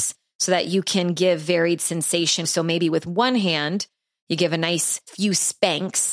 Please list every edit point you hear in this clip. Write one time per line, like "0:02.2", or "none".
0:02.5
0:05.0